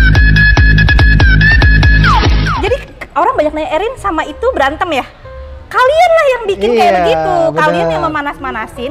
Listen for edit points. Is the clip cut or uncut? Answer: cut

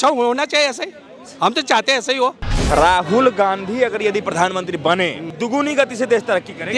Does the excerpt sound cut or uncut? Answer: cut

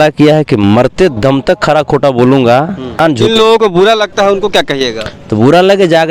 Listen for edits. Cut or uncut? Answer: cut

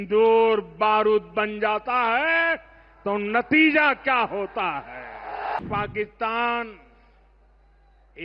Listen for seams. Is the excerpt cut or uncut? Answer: cut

